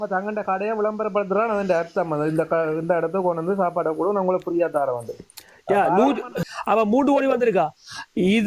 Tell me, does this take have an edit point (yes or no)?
yes